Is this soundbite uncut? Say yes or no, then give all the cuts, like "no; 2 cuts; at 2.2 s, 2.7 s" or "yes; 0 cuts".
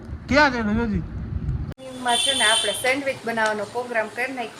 no; 1 cut; at 1.7 s